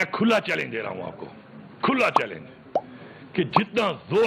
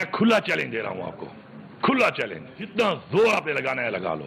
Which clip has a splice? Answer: second; 1 cut; at 2.7 s

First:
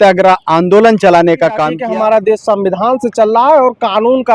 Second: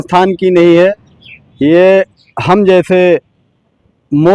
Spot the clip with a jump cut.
first; 1 cut; at 1.8 s

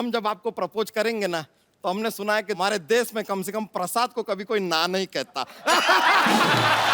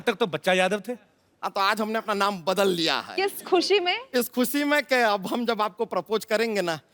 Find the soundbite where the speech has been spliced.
first; 1 cut; at 2.6 s

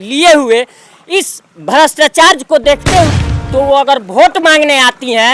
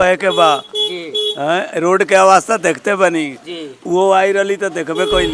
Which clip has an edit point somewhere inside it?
first; 1 cut; at 3.1 s

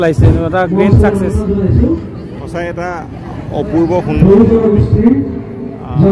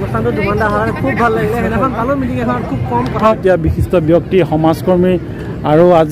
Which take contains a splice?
second; 1 cut; at 3.4 s

